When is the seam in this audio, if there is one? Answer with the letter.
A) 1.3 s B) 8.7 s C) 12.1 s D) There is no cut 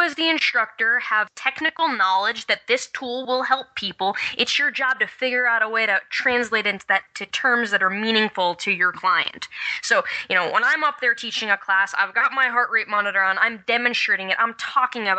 A